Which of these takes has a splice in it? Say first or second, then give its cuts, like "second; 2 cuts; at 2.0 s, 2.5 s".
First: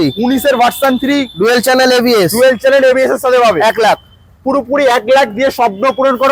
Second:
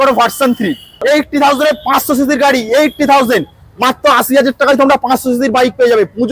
second; 1 cut; at 1.0 s